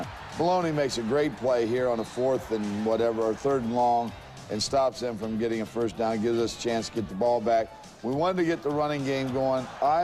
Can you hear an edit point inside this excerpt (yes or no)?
no